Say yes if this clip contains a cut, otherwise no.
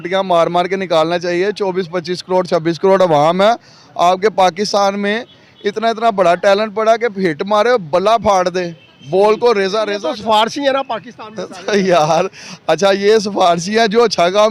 yes